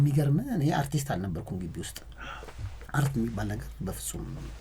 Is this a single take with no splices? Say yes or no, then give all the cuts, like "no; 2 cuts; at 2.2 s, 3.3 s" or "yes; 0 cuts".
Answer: yes; 0 cuts